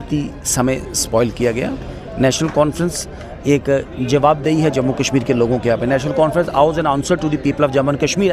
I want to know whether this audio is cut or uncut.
uncut